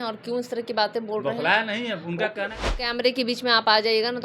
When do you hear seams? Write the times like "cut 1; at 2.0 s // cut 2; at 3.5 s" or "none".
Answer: cut 1; at 2.6 s